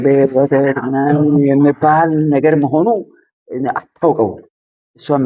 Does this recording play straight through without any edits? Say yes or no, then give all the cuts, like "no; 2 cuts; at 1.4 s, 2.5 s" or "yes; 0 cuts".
yes; 0 cuts